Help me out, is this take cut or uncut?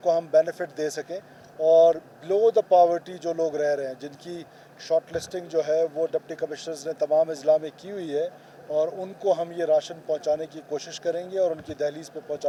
uncut